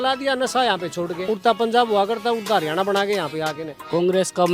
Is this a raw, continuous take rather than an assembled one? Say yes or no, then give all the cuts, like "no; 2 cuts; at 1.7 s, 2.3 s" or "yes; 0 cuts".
no; 2 cuts; at 1.2 s, 3.7 s